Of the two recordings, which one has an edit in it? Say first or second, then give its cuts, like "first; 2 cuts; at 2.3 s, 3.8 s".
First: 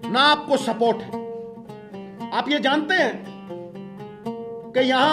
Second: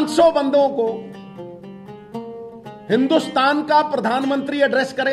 first; 2 cuts; at 1.1 s, 2.3 s